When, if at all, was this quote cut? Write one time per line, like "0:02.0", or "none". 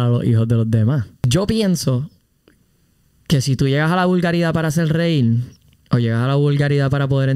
0:01.3